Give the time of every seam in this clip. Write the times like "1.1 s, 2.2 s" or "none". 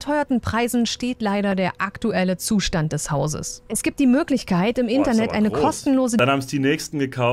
6.2 s

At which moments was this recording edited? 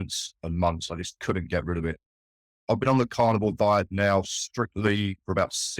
2.6 s

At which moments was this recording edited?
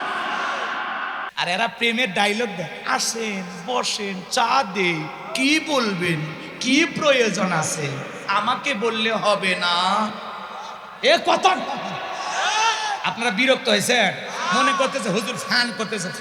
1.3 s

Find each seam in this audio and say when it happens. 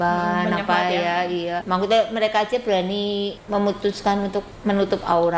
1.6 s, 3.4 s, 4.5 s

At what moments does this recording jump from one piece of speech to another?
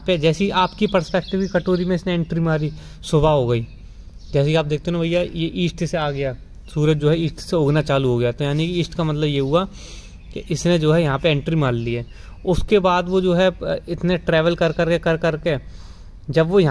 none

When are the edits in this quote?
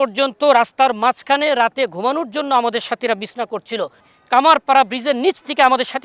4.1 s

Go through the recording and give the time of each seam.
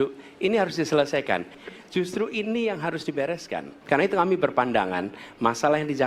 1.5 s, 3.7 s

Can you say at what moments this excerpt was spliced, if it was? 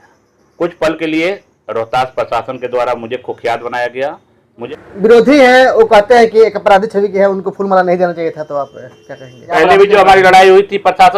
4.7 s, 9.5 s

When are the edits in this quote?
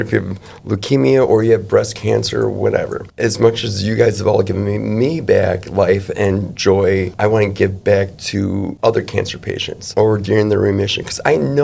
3.0 s, 7.1 s, 8.7 s, 9.8 s

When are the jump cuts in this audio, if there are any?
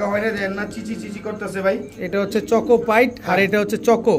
none

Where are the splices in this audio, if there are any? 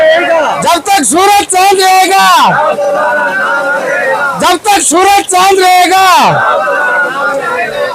none

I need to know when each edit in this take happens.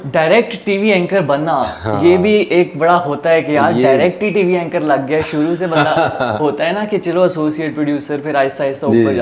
none

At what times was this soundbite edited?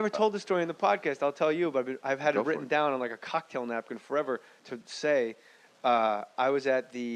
3.8 s

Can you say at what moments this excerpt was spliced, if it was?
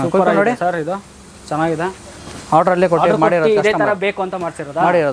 none

